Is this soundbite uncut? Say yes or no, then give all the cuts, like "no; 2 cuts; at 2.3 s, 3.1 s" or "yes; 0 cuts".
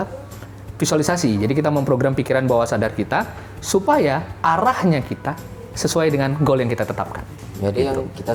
yes; 0 cuts